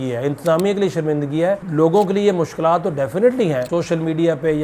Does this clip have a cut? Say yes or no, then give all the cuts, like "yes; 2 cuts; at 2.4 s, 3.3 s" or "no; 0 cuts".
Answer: yes; 2 cuts; at 1.6 s, 3.7 s